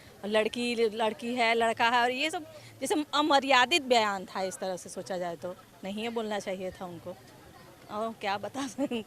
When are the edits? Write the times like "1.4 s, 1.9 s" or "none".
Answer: none